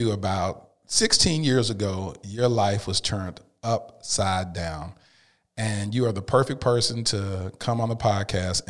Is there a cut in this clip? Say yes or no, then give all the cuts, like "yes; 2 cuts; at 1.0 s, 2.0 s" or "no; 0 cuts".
no; 0 cuts